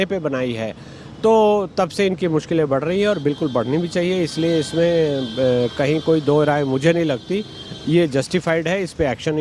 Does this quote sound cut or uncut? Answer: uncut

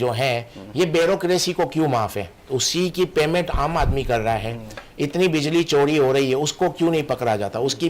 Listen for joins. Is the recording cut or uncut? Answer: cut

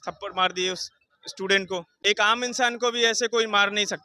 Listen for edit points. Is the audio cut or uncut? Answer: uncut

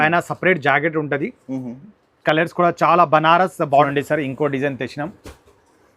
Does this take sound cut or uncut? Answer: cut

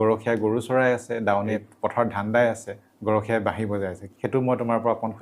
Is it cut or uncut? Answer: cut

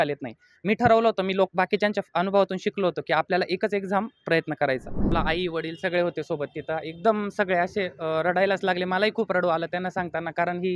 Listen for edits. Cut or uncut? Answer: cut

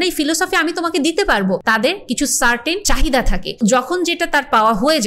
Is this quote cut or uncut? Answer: cut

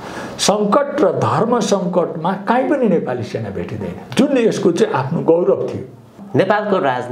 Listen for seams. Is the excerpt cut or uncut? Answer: cut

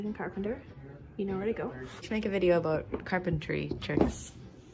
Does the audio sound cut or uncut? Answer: uncut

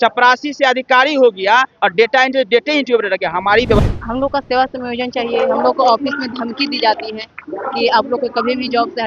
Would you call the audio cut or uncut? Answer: cut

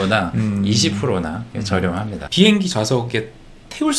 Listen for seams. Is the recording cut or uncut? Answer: cut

